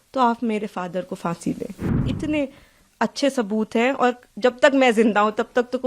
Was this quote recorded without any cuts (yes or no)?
no